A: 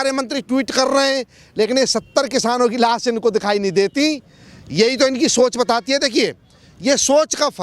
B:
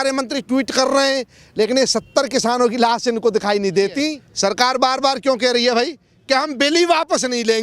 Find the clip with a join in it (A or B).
B